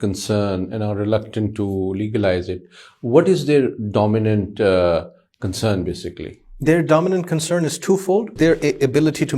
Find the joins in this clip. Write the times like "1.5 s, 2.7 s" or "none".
8.3 s